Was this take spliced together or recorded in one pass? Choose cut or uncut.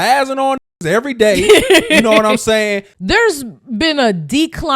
cut